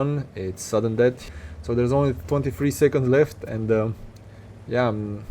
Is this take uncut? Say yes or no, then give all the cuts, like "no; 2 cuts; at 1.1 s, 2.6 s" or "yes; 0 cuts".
no; 1 cut; at 1.3 s